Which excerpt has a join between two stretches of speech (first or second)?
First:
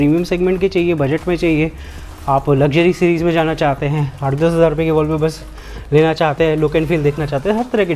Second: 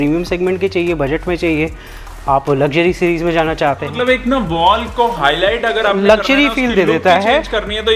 second